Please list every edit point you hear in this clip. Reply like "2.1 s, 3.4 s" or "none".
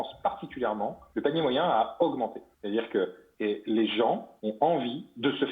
1.0 s, 2.5 s, 3.2 s, 4.3 s